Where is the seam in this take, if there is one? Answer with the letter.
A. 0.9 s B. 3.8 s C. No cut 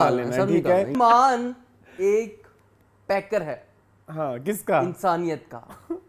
A